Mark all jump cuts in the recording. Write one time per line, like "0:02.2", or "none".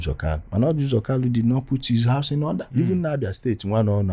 0:02.7